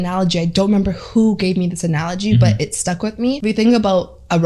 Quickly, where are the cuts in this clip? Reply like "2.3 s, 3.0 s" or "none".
3.4 s